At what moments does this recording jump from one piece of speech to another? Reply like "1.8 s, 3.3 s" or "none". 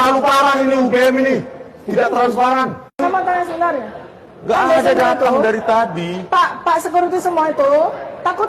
3.0 s